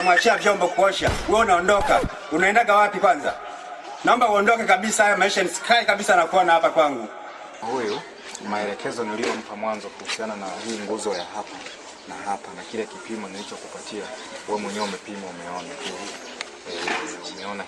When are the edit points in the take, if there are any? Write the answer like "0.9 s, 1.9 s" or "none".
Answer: 7.6 s